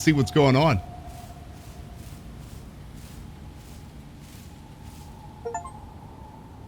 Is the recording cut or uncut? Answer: uncut